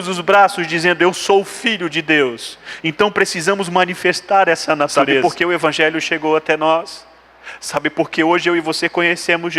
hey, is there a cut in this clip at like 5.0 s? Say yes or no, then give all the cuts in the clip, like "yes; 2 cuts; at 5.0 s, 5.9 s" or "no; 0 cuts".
yes; 1 cut; at 5.0 s